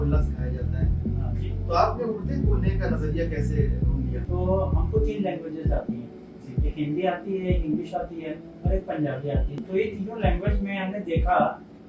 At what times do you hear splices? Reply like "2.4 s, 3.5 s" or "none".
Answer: 4.2 s, 9.6 s